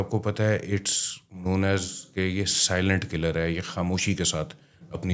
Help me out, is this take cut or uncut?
uncut